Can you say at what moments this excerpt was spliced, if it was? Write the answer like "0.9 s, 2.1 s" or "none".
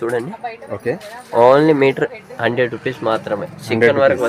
none